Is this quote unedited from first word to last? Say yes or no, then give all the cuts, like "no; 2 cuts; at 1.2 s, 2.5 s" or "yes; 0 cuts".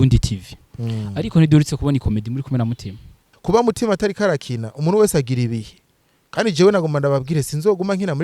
no; 1 cut; at 3.3 s